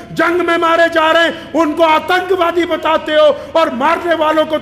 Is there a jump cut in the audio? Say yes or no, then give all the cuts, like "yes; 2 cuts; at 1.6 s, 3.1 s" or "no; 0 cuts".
no; 0 cuts